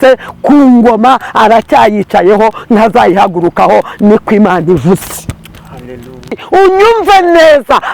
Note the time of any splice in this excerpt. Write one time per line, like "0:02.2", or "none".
0:06.4